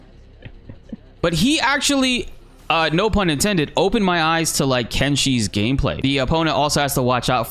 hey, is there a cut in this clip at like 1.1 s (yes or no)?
yes